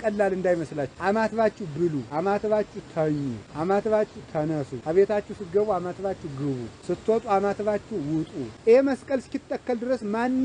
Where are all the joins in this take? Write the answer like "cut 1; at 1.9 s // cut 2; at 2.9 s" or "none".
cut 1; at 0.9 s // cut 2; at 2.1 s // cut 3; at 3.4 s // cut 4; at 4.7 s // cut 5; at 6.7 s // cut 6; at 8.4 s